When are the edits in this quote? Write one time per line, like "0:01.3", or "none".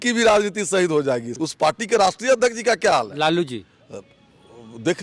0:01.3